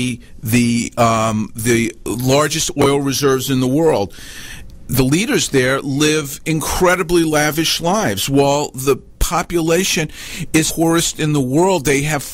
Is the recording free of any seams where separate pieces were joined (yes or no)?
no